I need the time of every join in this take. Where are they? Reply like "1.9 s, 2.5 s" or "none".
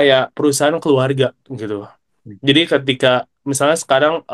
none